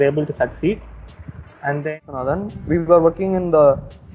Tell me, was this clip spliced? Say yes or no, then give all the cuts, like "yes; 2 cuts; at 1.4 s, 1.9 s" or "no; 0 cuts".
yes; 1 cut; at 1.8 s